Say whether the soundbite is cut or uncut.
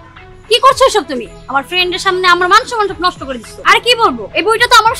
cut